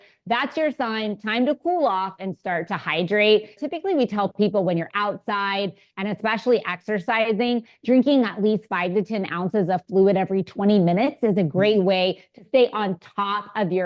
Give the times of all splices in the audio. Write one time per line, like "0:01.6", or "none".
0:03.5